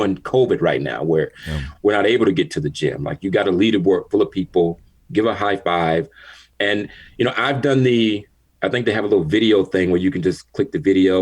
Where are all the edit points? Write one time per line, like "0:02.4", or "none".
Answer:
0:06.5